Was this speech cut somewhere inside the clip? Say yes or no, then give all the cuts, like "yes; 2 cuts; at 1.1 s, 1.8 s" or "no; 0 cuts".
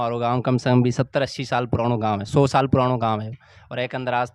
no; 0 cuts